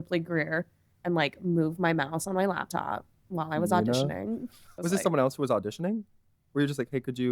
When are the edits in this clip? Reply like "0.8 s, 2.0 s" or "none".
4.7 s